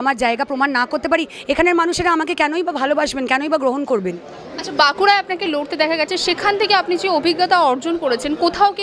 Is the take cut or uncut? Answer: uncut